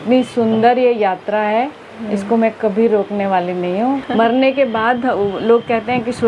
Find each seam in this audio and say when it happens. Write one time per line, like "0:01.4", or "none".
0:04.1